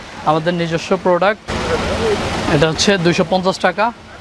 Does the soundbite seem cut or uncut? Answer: cut